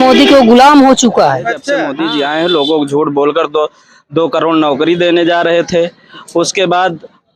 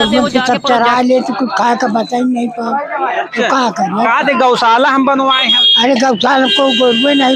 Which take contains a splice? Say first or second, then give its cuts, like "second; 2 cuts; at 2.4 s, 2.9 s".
first; 1 cut; at 1.7 s